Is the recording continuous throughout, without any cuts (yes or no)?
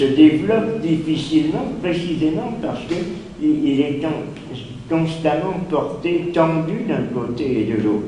no